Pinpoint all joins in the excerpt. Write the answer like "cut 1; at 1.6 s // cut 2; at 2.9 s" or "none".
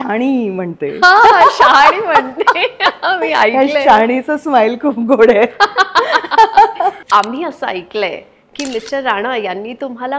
cut 1; at 7.0 s